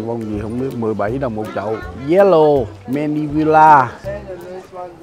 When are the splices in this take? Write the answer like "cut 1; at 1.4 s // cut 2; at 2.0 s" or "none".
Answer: none

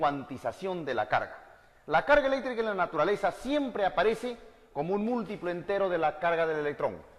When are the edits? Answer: none

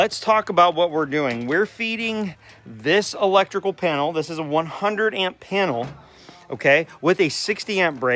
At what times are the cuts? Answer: none

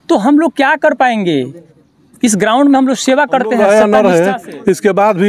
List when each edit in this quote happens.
cut 1; at 3.6 s

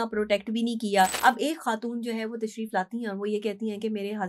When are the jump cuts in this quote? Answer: cut 1; at 1.2 s

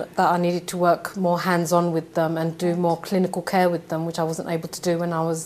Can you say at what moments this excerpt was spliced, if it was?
none

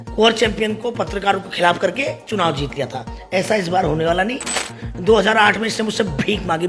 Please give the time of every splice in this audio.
cut 1; at 4.7 s

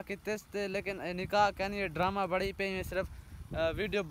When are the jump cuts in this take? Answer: none

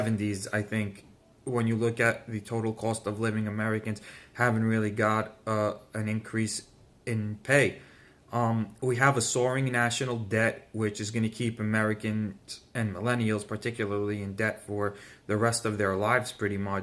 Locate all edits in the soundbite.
cut 1; at 15.4 s

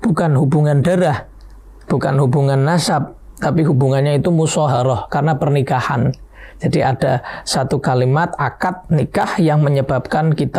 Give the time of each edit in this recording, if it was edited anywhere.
none

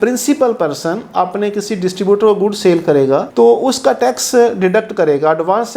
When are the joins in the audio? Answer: none

